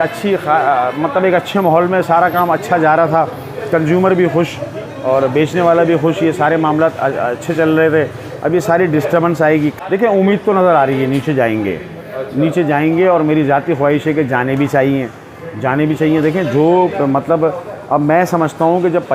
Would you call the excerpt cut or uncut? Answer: cut